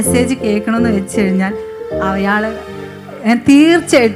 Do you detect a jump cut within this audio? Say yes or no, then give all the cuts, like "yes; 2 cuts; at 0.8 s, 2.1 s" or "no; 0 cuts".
no; 0 cuts